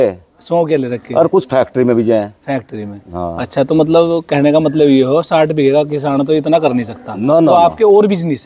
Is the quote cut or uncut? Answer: uncut